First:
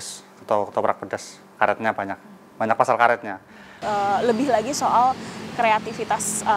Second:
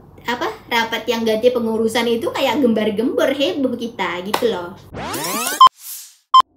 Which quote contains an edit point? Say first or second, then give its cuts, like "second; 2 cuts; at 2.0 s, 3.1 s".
first; 1 cut; at 3.8 s